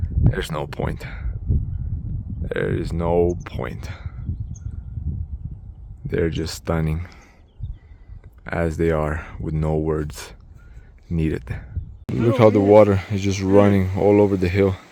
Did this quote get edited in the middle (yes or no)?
no